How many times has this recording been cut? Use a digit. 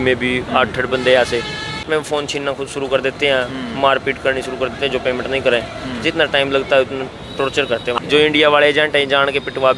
2